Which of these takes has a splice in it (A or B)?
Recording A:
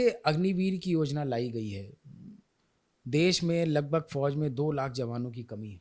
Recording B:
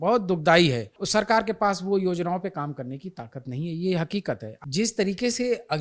B